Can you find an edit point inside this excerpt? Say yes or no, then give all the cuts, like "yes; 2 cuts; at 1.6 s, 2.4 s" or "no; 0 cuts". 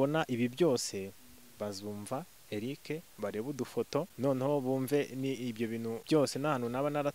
yes; 2 cuts; at 4.1 s, 6.0 s